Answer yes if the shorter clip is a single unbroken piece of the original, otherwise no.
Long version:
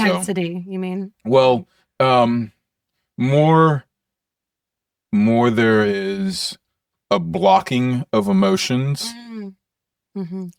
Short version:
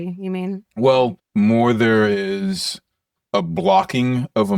no